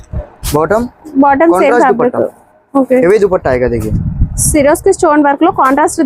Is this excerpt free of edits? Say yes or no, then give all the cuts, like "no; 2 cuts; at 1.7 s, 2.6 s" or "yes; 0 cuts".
yes; 0 cuts